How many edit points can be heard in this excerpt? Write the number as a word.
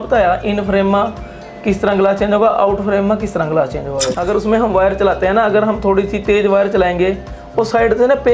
one